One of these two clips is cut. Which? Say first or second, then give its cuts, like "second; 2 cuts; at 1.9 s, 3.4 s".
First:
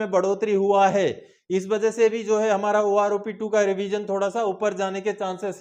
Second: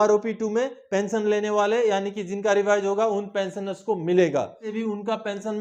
second; 1 cut; at 4.7 s